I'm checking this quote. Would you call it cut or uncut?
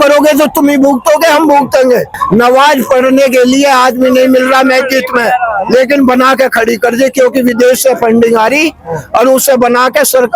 cut